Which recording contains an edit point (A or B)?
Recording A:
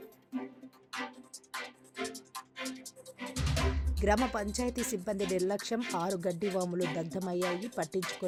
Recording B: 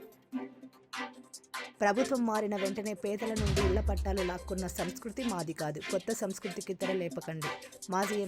B